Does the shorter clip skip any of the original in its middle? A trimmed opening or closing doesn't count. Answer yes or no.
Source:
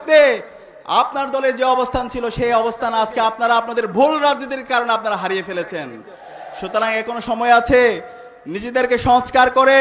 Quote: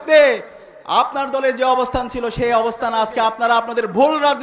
no